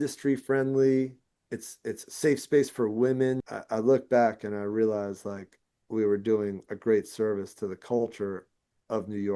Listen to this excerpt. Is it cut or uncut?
cut